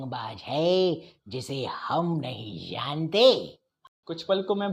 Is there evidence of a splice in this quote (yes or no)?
yes